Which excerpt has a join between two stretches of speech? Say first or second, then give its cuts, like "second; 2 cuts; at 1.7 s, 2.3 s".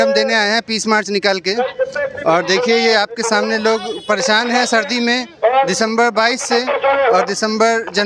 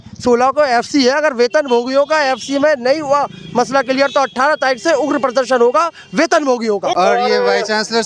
second; 1 cut; at 6.9 s